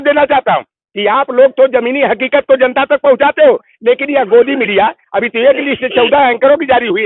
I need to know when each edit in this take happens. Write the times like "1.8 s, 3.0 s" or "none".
none